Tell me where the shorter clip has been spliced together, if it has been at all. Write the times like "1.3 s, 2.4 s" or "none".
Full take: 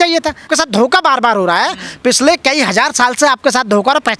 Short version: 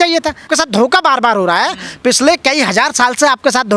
none